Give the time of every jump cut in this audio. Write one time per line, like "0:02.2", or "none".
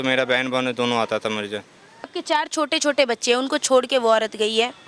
0:02.1

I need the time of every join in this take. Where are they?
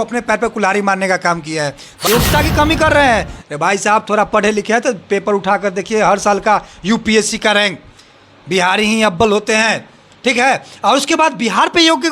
0:02.1

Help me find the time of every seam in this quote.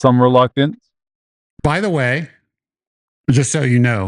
none

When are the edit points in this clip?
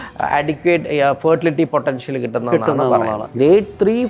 0:03.2

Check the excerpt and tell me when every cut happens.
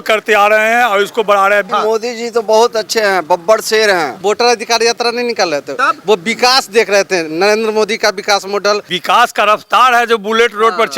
0:01.7
0:04.2
0:08.9

